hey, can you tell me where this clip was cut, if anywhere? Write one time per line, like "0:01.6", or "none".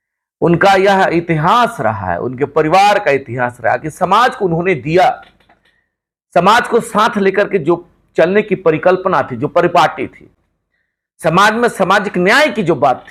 none

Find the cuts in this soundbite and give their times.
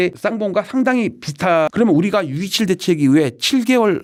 none

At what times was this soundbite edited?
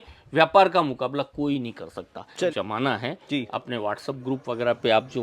0:02.5

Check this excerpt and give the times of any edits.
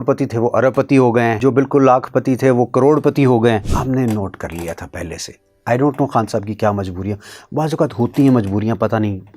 0:01.4
0:03.7

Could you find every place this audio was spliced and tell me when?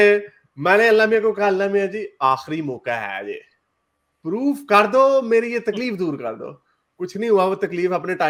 none

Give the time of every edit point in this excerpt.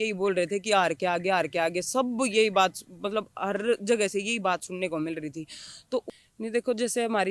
0:06.0

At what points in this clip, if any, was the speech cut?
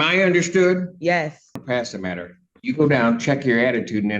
0:01.6

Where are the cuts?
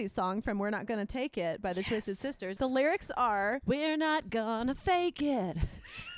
0:02.5
0:03.6

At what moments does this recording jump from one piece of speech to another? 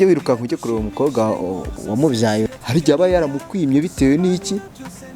0:02.5

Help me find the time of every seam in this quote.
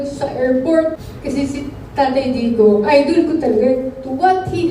0:01.1

